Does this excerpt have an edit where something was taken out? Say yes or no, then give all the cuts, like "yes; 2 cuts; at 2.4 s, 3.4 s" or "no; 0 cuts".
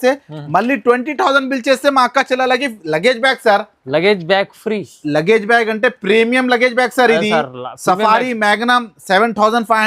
no; 0 cuts